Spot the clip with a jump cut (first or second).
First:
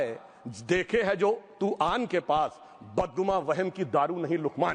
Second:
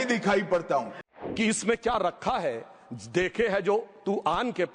second